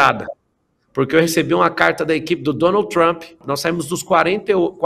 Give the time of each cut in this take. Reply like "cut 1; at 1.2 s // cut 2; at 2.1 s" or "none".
cut 1; at 3.4 s